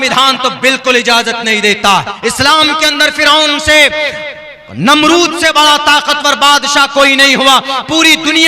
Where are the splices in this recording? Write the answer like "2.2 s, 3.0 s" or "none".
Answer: 2.1 s